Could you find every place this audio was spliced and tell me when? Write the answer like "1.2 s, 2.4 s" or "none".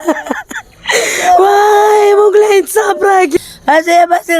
3.3 s